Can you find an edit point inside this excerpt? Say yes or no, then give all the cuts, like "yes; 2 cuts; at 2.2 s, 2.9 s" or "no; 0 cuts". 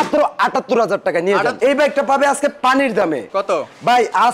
yes; 1 cut; at 1.5 s